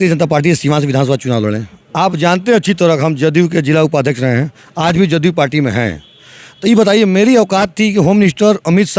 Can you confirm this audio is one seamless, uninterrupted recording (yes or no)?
yes